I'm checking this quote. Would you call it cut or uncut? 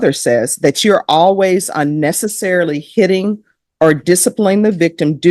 uncut